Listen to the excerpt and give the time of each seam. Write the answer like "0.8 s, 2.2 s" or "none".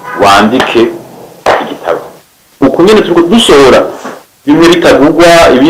2.6 s